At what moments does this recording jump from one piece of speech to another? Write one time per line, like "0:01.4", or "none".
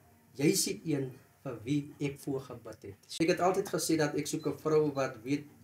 0:03.0